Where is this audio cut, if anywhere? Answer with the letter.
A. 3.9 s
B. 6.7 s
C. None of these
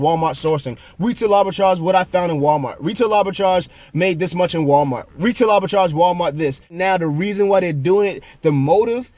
B